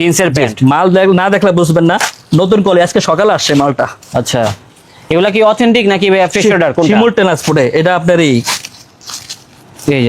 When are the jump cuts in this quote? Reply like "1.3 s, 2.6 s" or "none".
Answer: none